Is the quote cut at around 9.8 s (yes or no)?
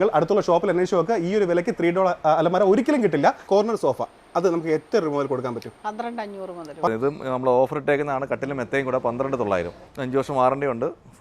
yes